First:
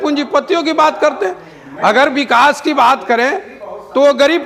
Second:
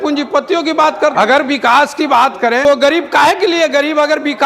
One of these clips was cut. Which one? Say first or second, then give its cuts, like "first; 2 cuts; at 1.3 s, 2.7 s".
second; 2 cuts; at 1.1 s, 2.6 s